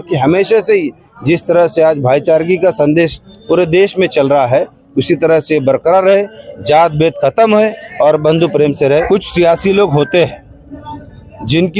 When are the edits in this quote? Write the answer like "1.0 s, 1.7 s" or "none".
9.1 s